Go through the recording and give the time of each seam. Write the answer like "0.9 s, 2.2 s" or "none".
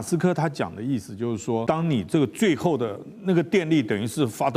1.6 s